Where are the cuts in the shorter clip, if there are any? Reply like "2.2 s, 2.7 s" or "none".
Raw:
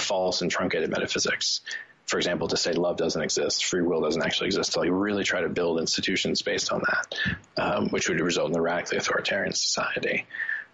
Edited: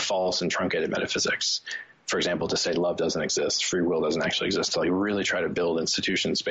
none